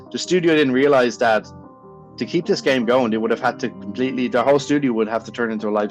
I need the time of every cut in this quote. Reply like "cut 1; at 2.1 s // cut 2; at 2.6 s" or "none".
none